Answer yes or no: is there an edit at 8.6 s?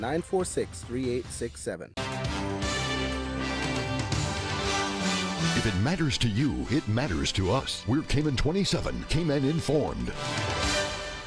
no